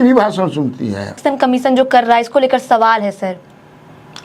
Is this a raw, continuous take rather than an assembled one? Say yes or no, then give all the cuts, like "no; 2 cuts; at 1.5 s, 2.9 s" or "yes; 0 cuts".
no; 1 cut; at 1.2 s